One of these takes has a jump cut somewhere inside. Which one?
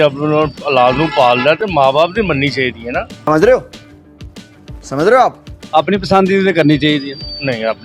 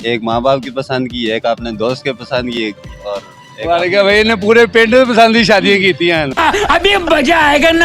first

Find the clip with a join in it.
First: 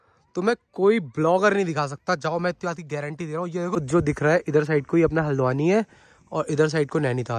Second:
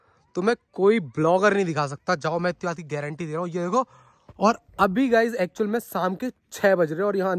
first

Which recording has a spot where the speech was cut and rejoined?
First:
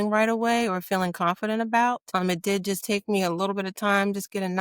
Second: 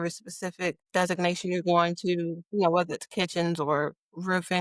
first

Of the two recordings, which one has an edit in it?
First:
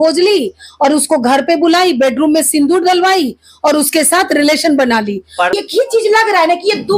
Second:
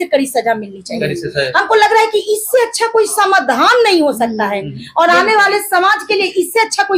first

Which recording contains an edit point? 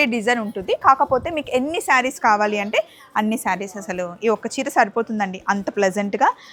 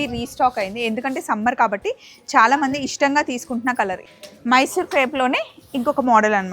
second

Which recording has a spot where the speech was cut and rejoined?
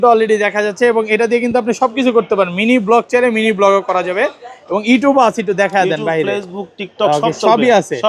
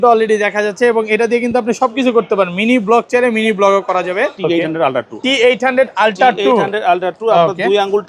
second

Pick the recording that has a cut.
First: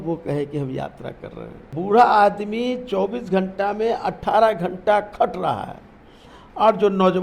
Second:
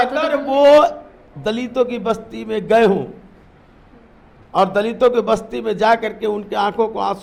first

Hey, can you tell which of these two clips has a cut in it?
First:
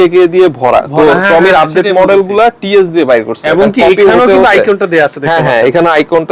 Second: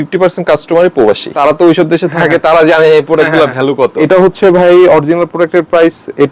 second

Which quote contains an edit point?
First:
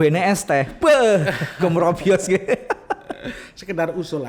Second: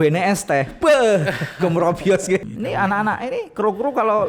second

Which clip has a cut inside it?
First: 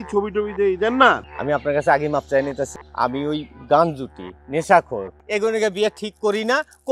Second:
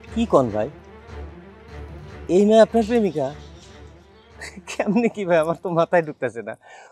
first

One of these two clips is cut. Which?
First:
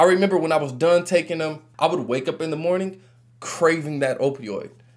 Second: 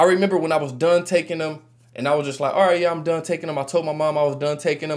first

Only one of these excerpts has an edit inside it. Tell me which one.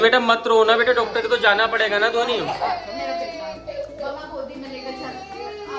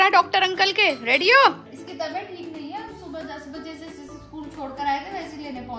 second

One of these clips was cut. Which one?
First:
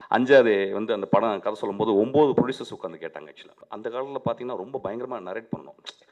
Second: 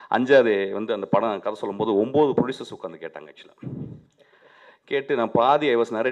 first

